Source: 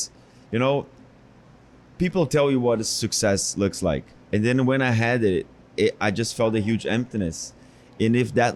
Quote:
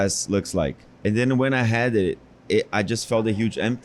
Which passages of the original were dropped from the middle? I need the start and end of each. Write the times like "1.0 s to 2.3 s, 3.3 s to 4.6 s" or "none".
none